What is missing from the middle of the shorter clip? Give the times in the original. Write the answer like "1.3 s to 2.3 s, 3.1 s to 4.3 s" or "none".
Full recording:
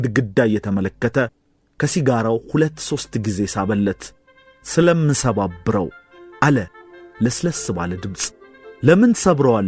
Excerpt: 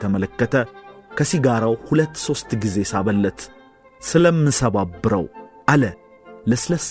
6.1 s to 6.2 s